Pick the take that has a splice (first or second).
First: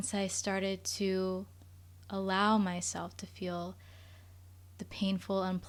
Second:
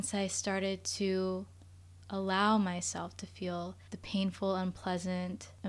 second